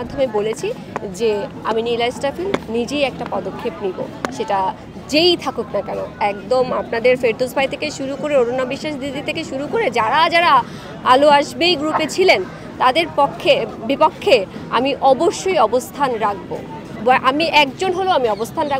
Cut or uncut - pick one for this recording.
uncut